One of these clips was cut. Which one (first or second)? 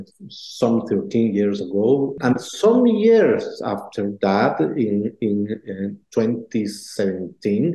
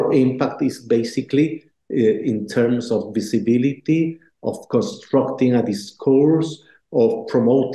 first